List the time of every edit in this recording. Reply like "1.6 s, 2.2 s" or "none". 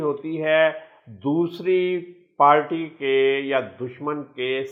none